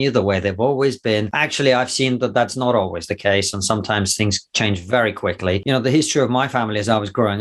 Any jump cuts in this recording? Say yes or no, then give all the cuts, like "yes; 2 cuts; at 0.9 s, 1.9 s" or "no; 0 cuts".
yes; 2 cuts; at 1.4 s, 5.6 s